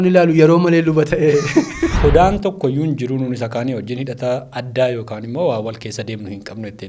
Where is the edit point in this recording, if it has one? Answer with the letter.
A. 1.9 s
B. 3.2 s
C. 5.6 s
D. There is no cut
A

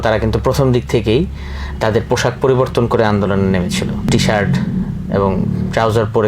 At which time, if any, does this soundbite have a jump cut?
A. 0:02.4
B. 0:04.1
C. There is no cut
B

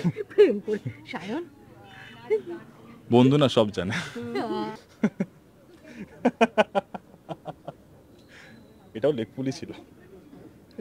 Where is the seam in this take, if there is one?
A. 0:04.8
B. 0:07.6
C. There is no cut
A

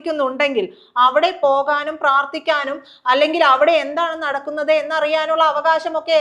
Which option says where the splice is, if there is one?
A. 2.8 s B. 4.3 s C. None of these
C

